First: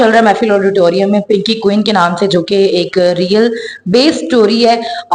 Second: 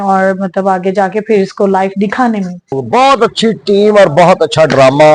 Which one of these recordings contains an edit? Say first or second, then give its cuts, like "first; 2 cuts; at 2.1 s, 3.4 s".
second; 1 cut; at 2.8 s